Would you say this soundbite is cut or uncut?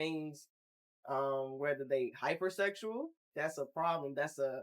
cut